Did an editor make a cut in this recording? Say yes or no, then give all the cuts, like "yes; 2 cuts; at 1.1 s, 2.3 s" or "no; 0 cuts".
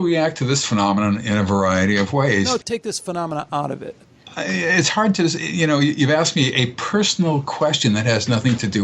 yes; 2 cuts; at 2.6 s, 4.2 s